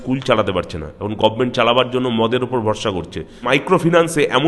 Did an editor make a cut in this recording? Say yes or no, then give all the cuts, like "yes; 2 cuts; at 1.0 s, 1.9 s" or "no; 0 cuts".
yes; 1 cut; at 3.4 s